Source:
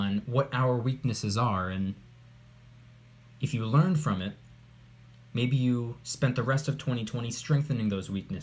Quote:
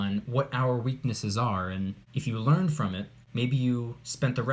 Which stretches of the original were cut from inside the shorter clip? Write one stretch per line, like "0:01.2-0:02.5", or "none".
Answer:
0:02.0-0:03.3
0:04.4-0:05.2